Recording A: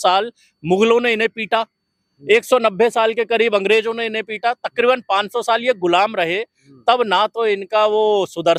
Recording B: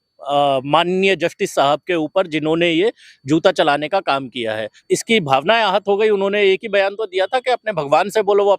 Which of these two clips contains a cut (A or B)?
B